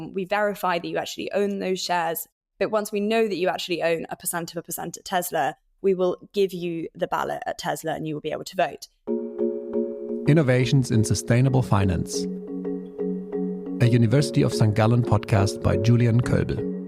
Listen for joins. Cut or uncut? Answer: cut